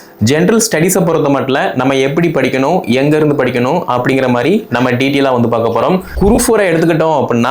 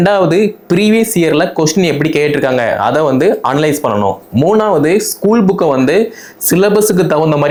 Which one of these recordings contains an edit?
first; 1 cut; at 6.1 s

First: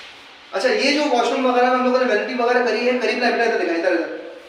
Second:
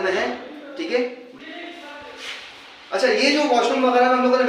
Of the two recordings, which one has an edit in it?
second; 1 cut; at 1.2 s

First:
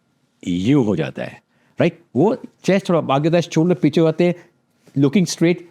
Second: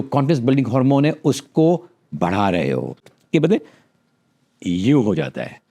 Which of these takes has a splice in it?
second; 1 cut; at 3.1 s

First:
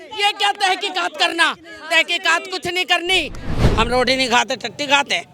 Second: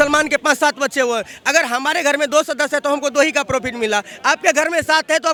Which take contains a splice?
first; 1 cut; at 3.5 s

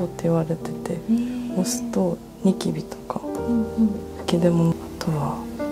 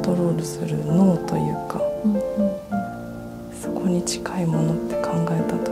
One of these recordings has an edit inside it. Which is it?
first; 1 cut; at 4.7 s

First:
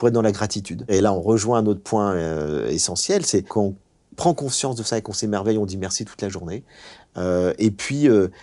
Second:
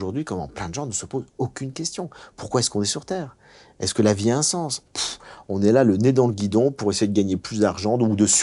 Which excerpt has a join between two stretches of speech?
first; 2 cuts; at 0.9 s, 3.5 s

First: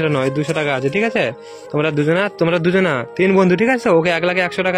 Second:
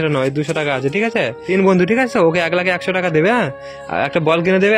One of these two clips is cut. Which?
second; 1 cut; at 1.4 s

